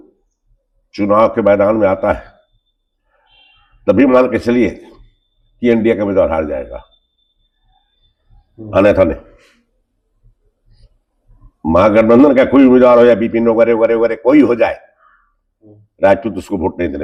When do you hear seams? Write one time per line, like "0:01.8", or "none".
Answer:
none